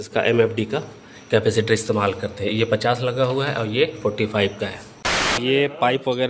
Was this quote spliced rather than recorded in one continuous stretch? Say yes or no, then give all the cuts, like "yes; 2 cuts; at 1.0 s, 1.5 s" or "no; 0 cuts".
yes; 1 cut; at 5.4 s